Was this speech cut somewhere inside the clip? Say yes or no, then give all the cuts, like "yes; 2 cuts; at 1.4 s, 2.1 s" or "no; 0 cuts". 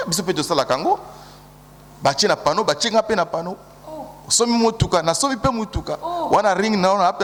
no; 0 cuts